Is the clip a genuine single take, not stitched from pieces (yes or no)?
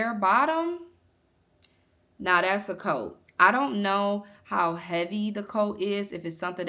yes